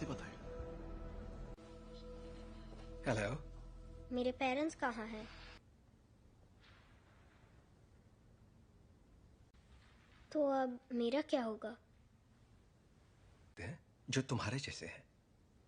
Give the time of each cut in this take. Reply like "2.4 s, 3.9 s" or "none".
5.6 s